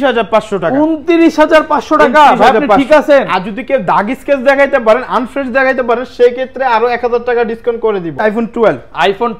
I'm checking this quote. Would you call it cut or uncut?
cut